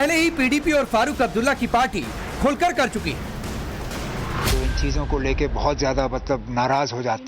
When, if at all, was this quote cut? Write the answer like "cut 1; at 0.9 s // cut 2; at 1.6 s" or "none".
cut 1; at 3.8 s